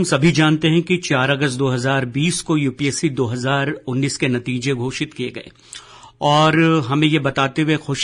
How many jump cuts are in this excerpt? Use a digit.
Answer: 0